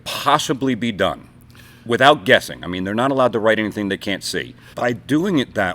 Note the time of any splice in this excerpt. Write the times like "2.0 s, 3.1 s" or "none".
4.6 s